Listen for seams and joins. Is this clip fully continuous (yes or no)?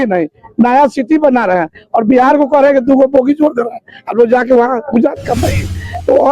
yes